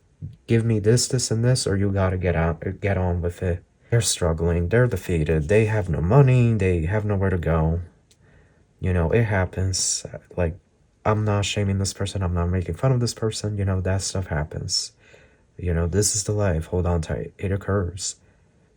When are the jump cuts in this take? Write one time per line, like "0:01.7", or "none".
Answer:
0:03.9